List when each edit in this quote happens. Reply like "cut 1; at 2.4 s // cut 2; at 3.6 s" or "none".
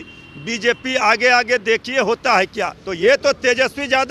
cut 1; at 2.8 s